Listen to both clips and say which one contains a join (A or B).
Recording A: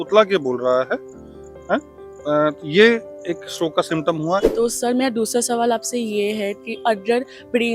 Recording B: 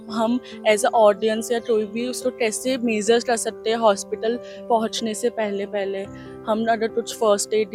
A